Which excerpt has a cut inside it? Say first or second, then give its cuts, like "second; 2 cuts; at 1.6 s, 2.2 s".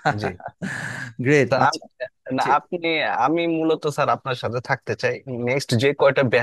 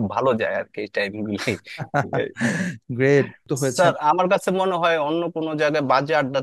second; 1 cut; at 3.4 s